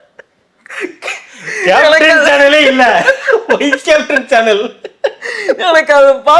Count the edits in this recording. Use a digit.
0